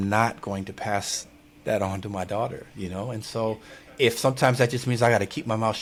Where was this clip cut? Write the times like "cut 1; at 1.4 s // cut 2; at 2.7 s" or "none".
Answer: none

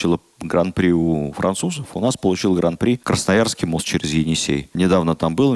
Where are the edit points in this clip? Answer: cut 1; at 3.0 s // cut 2; at 4.7 s

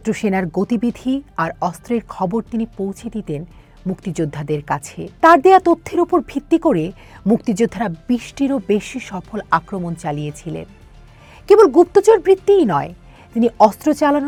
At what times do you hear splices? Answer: none

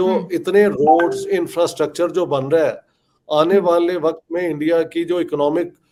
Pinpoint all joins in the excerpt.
none

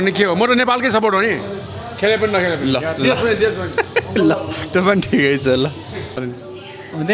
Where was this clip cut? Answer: cut 1; at 6.2 s

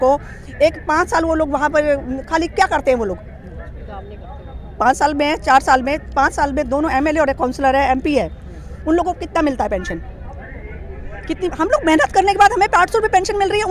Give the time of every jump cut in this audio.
none

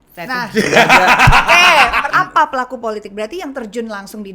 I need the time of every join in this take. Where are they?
cut 1; at 2.0 s

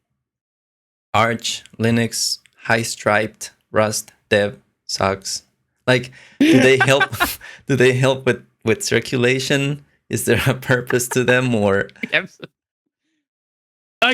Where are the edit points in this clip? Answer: none

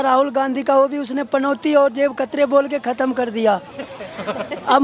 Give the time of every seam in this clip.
none

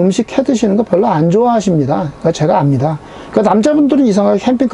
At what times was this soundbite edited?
none

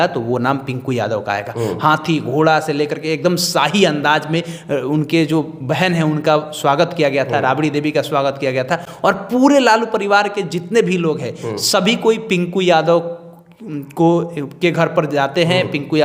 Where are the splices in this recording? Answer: none

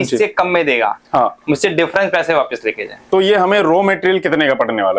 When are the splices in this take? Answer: cut 1; at 3.1 s

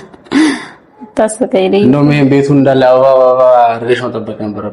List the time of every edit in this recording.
none

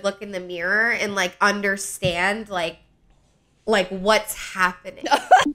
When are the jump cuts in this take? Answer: none

